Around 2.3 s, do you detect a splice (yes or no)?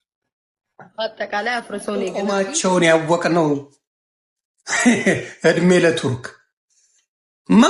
yes